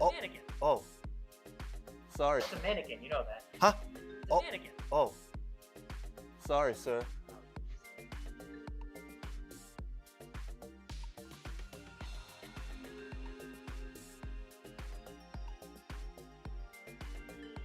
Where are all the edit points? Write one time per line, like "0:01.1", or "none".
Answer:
0:02.5